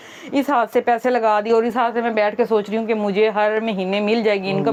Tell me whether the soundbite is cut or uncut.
uncut